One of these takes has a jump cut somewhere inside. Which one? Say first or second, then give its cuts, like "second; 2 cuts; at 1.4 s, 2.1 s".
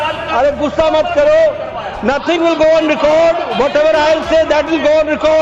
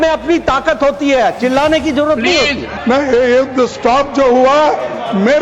second; 1 cut; at 2.7 s